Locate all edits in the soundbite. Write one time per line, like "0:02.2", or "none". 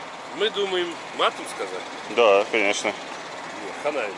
0:01.0